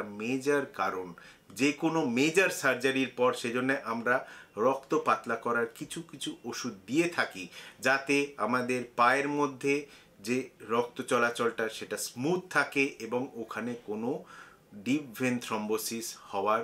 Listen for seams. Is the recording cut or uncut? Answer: uncut